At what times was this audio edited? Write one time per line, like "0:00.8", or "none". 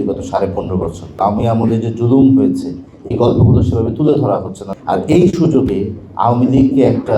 0:01.2
0:04.6